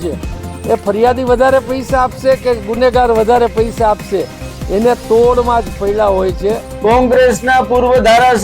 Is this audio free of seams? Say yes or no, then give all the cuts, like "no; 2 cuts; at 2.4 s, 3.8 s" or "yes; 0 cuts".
no; 1 cut; at 6.6 s